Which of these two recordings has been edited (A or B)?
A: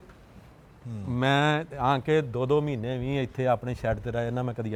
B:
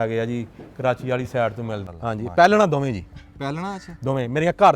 B